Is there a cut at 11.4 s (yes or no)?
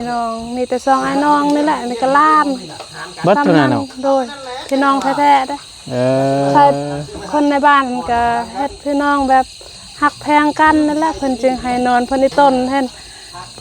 no